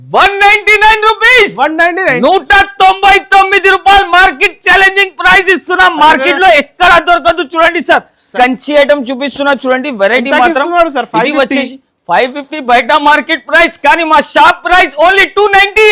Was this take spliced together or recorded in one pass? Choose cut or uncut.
cut